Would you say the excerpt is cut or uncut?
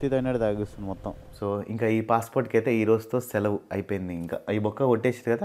cut